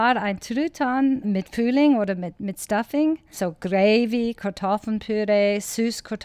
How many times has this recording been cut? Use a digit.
2